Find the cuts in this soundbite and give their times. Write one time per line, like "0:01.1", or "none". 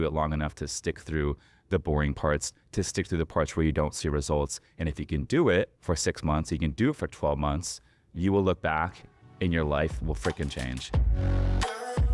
0:05.8
0:10.8